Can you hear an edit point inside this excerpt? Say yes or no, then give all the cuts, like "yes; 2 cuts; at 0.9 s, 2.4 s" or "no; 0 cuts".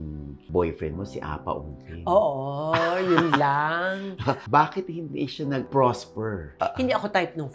yes; 1 cut; at 4.4 s